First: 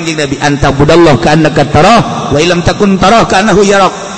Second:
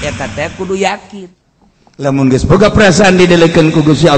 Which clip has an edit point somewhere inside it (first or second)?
second